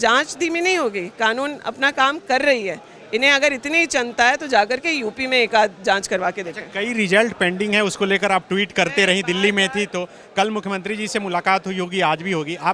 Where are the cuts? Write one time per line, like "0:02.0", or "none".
none